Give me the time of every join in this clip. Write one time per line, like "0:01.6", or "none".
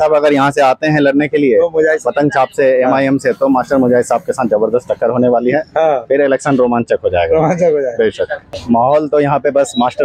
0:08.5

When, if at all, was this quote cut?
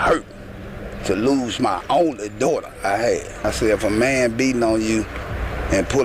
0:03.4

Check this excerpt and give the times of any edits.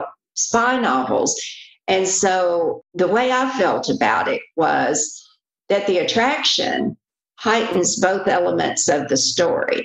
0:02.8

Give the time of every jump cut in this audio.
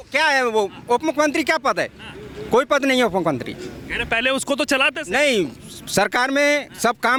none

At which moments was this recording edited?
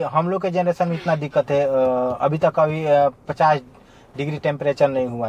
none

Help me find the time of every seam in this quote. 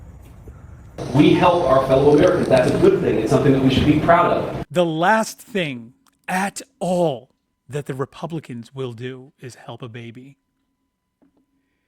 0:01.0

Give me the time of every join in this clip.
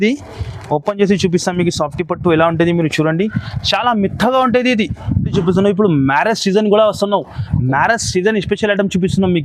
0:05.3

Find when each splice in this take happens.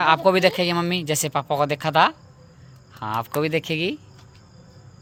none

